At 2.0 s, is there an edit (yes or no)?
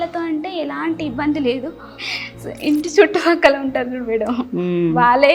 yes